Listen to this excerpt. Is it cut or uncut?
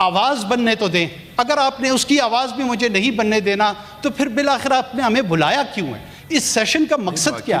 uncut